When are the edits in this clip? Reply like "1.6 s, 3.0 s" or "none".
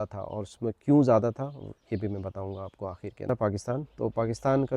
3.3 s

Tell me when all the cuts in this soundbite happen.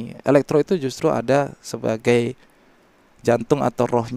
none

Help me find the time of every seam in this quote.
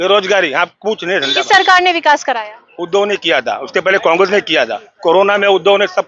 none

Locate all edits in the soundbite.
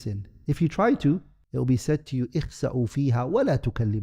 1.4 s

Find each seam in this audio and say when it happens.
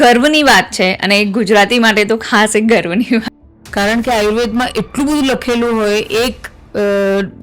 3.3 s

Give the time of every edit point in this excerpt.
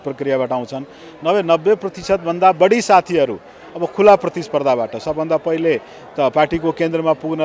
none

